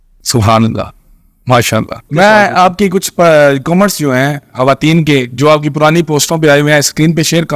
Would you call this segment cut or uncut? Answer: cut